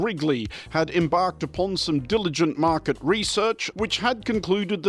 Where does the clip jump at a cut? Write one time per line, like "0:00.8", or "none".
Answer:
0:03.7